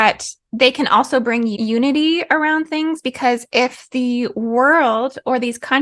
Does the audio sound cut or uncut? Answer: cut